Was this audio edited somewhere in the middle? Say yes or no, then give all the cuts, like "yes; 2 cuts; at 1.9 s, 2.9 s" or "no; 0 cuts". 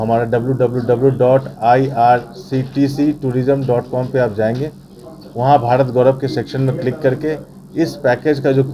no; 0 cuts